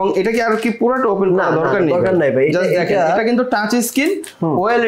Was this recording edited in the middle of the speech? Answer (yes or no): no